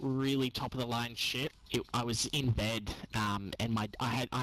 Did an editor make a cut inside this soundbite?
yes; 1 cut; at 1.6 s

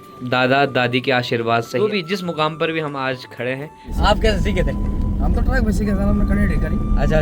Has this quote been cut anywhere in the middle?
yes; 2 cuts; at 1.9 s, 3.9 s

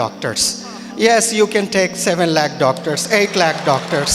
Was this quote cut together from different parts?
no; 0 cuts

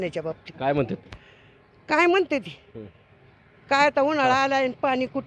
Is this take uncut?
yes; 0 cuts

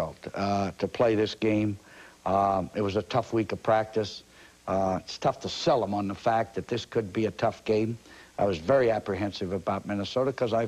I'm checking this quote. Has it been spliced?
no; 0 cuts

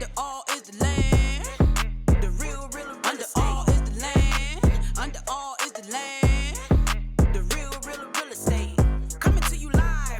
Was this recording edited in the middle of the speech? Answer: yes; 1 cut; at 8.7 s

